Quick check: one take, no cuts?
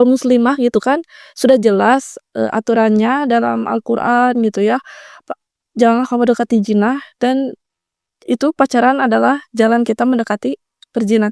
yes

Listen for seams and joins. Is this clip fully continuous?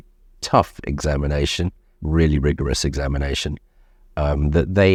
yes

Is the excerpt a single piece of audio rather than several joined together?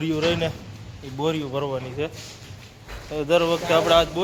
yes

